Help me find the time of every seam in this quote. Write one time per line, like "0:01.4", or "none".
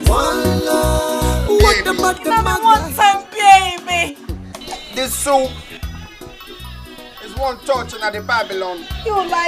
0:02.2